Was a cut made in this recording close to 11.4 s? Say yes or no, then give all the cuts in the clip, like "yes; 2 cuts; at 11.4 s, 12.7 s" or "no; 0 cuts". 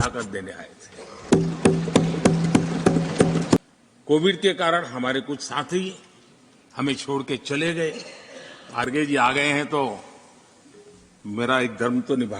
no; 2 cuts; at 3.6 s, 8.9 s